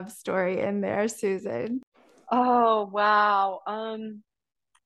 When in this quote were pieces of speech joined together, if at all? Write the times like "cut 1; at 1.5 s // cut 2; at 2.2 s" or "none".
none